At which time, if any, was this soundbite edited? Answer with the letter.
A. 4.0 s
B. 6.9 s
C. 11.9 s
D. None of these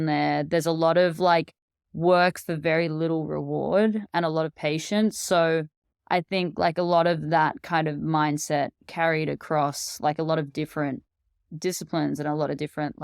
A